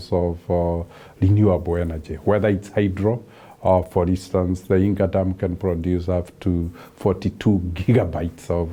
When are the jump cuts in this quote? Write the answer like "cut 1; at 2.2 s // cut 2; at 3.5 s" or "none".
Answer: none